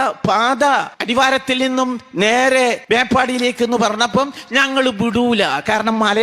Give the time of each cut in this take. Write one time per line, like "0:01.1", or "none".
0:01.0
0:02.8